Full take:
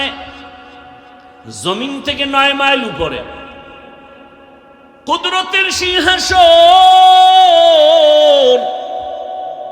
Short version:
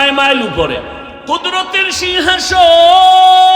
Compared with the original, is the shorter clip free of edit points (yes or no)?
no